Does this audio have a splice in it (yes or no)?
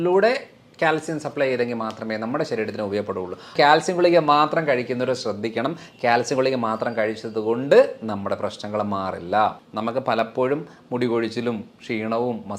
yes